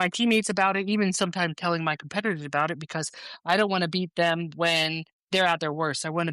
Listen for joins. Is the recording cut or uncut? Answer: uncut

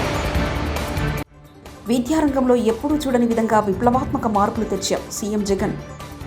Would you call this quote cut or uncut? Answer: cut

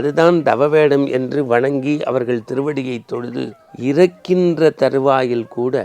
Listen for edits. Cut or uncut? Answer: cut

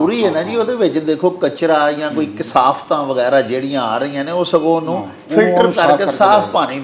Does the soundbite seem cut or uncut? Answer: uncut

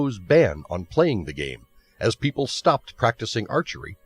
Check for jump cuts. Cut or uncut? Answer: cut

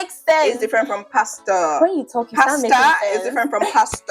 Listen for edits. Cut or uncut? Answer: uncut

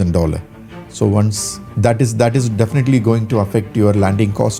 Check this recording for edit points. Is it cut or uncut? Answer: uncut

